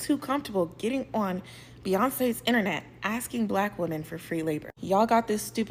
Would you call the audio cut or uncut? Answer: uncut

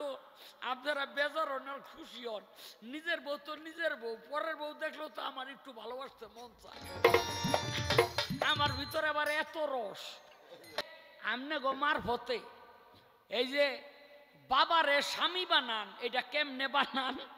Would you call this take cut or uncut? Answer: cut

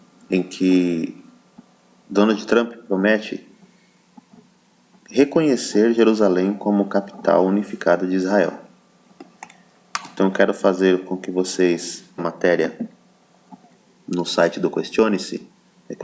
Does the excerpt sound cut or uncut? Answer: uncut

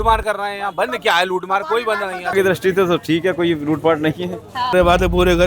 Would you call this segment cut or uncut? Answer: cut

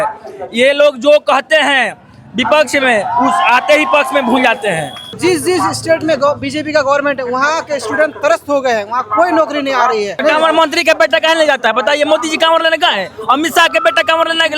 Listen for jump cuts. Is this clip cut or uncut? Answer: cut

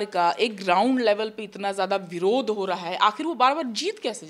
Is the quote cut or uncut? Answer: uncut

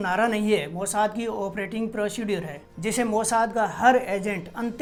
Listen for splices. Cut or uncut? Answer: uncut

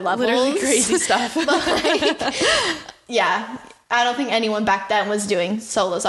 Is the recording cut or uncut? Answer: uncut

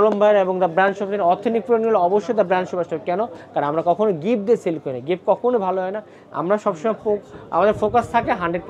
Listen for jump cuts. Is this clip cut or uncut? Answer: uncut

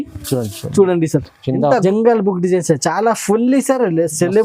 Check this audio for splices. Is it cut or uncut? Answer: cut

